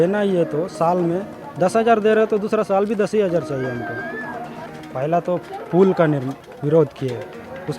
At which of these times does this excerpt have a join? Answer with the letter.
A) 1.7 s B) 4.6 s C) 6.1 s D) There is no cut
B